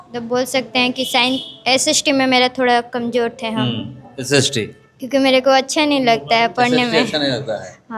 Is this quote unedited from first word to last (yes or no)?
yes